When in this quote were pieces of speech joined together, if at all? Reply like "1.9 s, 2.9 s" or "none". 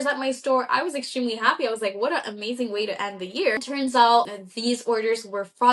3.6 s, 4.3 s